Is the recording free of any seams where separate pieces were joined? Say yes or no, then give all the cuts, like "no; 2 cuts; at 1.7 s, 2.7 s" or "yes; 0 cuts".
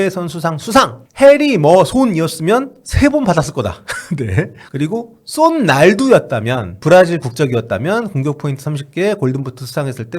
no; 3 cuts; at 1.0 s, 4.6 s, 6.7 s